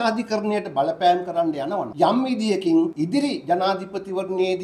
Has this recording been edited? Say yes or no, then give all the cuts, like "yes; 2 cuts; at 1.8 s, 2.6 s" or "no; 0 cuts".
yes; 2 cuts; at 1.9 s, 2.9 s